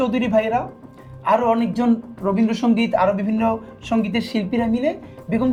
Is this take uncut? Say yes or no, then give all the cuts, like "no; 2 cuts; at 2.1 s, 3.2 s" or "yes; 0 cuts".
yes; 0 cuts